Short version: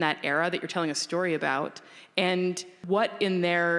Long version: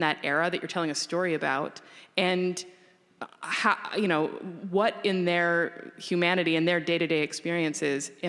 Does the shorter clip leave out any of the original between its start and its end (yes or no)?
yes